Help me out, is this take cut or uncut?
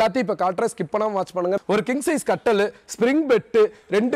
cut